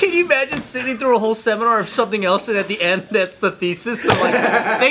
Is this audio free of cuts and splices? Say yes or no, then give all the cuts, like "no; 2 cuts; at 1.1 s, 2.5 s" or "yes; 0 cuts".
yes; 0 cuts